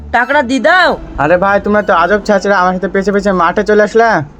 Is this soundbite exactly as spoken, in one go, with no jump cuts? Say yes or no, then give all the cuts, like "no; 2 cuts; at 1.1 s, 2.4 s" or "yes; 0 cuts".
no; 1 cut; at 1.1 s